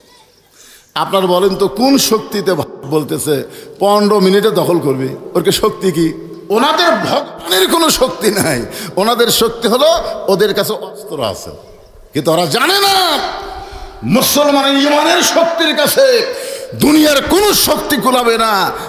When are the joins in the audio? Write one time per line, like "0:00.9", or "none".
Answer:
0:06.3